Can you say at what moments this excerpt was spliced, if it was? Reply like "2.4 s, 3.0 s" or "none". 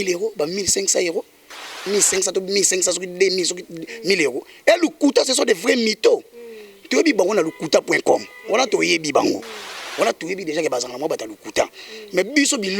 1.8 s